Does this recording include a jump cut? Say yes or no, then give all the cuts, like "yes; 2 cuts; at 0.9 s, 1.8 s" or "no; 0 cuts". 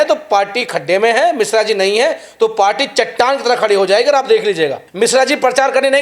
yes; 1 cut; at 4.8 s